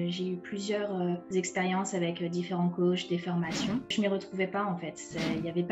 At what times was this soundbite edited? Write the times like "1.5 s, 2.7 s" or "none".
1.2 s, 3.9 s